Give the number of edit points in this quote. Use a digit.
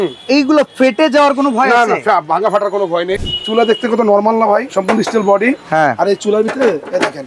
2